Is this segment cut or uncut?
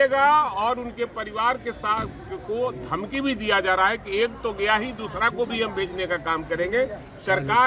uncut